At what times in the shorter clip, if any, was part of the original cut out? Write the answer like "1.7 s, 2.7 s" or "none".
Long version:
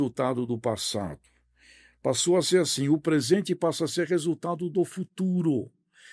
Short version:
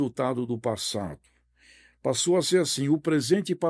none